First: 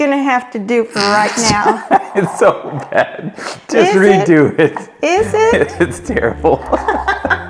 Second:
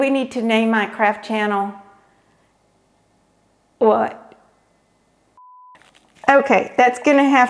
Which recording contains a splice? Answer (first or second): second